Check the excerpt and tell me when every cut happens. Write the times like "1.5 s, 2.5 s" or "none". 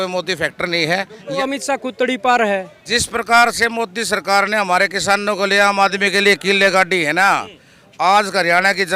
1.4 s, 2.8 s